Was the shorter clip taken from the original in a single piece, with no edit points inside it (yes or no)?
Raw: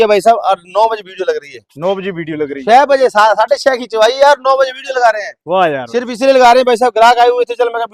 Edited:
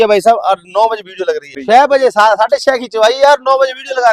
no